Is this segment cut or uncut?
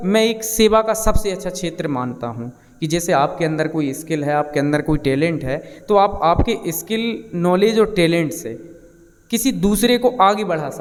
uncut